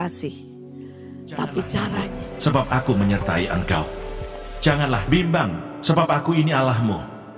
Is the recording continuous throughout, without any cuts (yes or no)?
no